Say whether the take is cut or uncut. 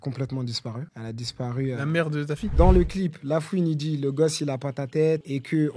cut